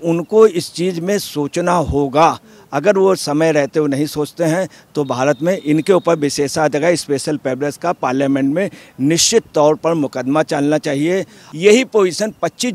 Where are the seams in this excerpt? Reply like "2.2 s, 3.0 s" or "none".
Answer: 11.4 s